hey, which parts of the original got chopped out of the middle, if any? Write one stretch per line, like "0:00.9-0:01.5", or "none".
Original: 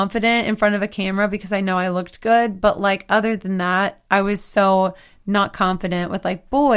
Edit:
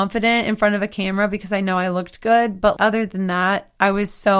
0:02.8-0:03.1